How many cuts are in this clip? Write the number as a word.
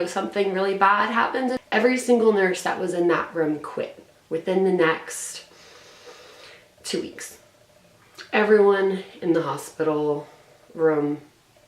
one